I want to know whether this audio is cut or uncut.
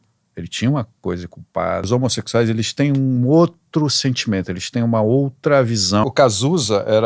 cut